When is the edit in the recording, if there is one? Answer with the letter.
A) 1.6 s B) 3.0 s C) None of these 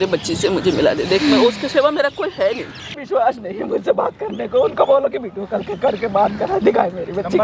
B